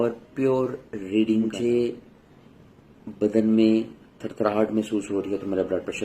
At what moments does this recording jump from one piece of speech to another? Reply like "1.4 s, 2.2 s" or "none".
1.5 s